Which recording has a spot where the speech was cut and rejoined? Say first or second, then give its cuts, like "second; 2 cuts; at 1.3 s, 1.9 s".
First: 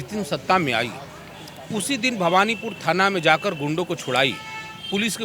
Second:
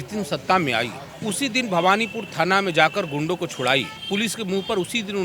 second; 2 cuts; at 1.0 s, 4.0 s